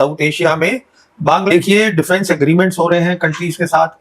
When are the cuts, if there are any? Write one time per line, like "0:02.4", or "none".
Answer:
0:01.4